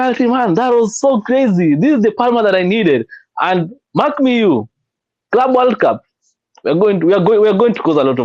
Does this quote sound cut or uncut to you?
uncut